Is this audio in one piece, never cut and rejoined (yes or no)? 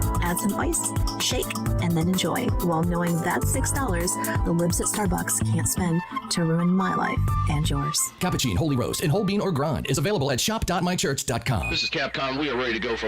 no